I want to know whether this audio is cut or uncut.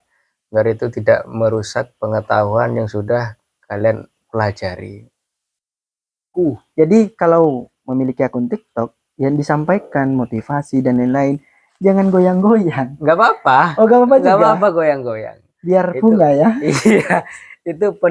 cut